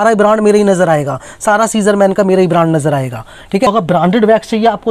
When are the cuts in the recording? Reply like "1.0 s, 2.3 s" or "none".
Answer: 3.7 s